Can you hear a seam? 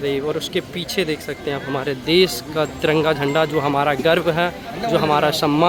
no; 0 cuts

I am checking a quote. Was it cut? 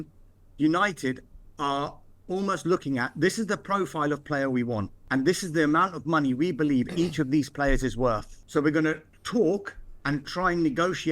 yes; 3 cuts; at 5.0 s, 8.3 s, 9.1 s

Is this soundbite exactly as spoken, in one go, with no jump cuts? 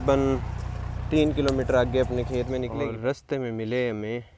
no; 1 cut; at 2.7 s

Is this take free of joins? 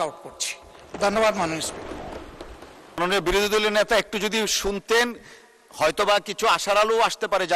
no; 1 cut; at 3.0 s

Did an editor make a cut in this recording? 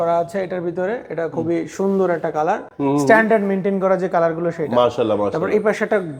no; 0 cuts

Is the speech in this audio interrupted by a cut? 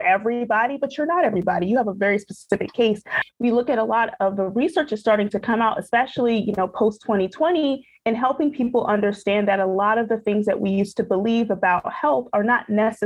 yes; 1 cut; at 3.2 s

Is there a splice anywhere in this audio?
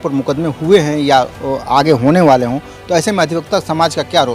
no; 0 cuts

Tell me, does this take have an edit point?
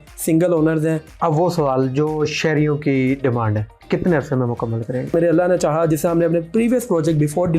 yes; 3 cuts; at 1.1 s, 3.7 s, 5.1 s

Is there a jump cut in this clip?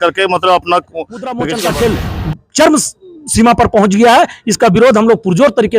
yes; 1 cut; at 1.4 s

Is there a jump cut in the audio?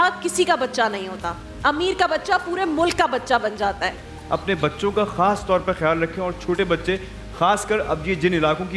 no; 0 cuts

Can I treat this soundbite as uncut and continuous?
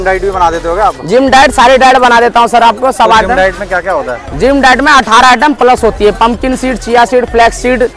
yes; 0 cuts

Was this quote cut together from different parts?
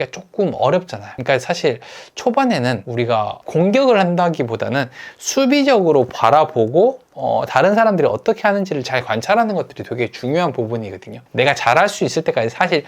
yes; 1 cut; at 2.8 s

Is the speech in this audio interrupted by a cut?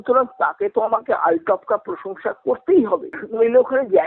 yes; 1 cut; at 3.2 s

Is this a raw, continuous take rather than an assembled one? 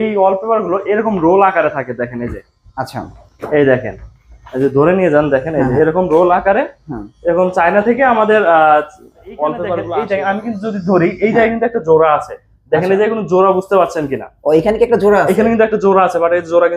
no; 1 cut; at 9.8 s

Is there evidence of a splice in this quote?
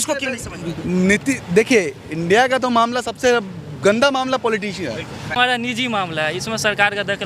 yes; 1 cut; at 5.2 s

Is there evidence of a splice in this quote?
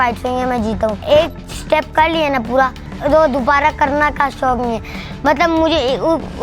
yes; 2 cuts; at 1.0 s, 2.9 s

